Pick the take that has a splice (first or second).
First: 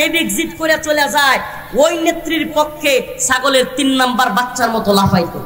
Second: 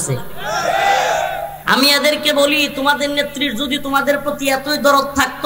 second